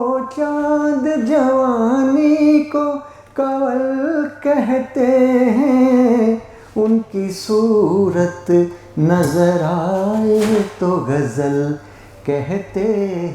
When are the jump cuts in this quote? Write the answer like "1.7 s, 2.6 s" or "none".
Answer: none